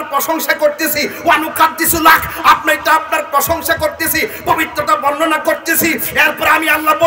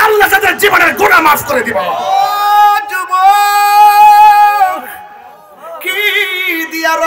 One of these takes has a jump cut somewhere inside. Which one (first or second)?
second